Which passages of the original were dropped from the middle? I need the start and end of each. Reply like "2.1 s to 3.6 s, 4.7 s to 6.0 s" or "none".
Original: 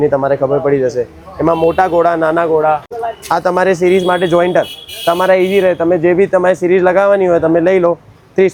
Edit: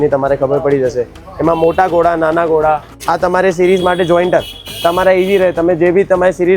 2.9 s to 3.2 s